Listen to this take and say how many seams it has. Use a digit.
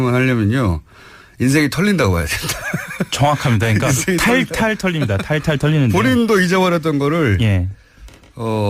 0